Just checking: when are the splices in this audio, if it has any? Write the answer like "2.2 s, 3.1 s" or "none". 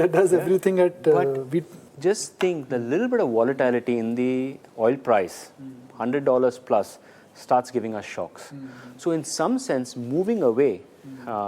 4.0 s